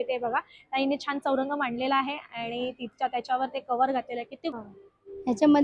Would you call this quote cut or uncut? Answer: cut